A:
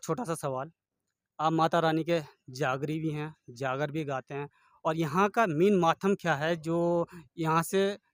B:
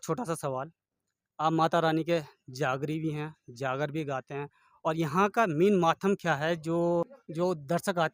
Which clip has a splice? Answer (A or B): B